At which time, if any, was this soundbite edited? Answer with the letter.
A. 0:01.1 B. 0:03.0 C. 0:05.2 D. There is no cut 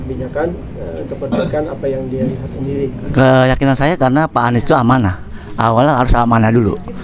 B